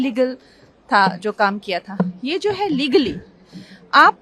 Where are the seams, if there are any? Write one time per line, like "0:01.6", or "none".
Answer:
none